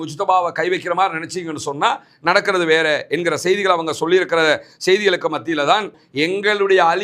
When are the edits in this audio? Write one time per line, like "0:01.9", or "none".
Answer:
0:05.9